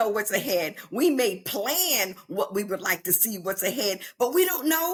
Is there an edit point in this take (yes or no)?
no